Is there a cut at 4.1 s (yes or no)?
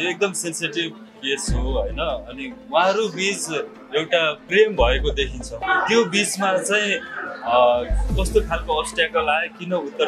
yes